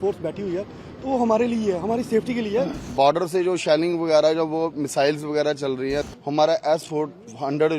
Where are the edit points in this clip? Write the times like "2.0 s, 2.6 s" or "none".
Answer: 2.9 s, 6.1 s